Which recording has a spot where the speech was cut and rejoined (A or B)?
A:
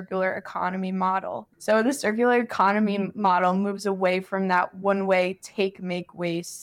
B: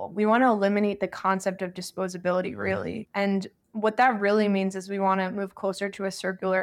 A